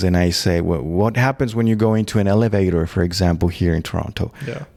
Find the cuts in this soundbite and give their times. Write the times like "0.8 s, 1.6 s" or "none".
none